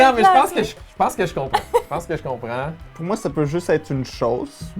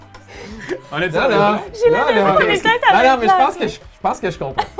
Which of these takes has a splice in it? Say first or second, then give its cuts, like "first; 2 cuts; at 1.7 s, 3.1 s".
first; 1 cut; at 2.9 s